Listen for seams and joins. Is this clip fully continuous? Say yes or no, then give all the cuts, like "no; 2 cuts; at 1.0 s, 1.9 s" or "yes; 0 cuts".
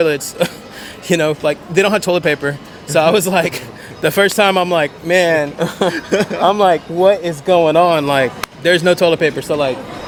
yes; 0 cuts